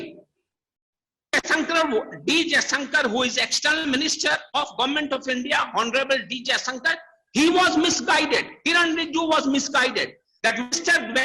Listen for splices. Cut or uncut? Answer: uncut